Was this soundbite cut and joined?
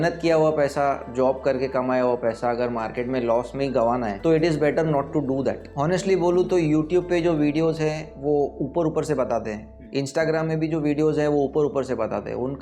yes; 2 cuts; at 4.1 s, 5.7 s

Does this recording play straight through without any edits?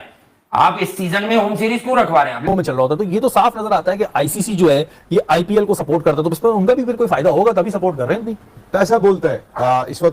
no; 1 cut; at 2.5 s

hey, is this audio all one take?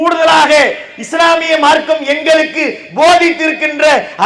yes; 0 cuts

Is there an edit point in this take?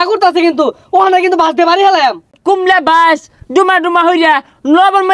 yes; 1 cut; at 2.4 s

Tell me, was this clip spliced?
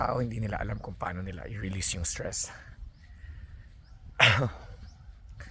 no; 0 cuts

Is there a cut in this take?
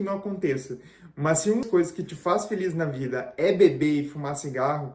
yes; 1 cut; at 1.7 s

